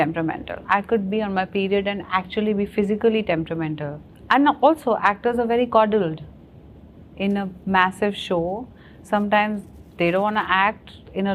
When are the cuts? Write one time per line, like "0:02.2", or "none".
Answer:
none